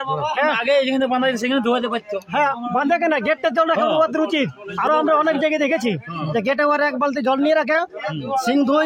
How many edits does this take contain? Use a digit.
0